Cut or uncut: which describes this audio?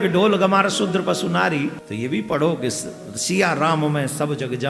cut